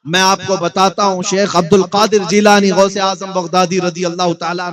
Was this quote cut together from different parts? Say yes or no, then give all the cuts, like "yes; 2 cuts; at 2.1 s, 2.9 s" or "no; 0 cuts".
no; 0 cuts